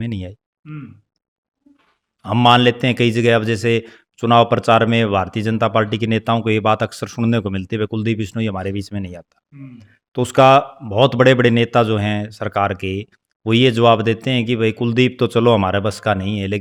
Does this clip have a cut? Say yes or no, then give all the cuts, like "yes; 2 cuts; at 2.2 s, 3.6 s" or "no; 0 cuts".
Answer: no; 0 cuts